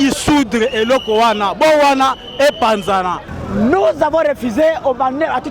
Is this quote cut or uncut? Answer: cut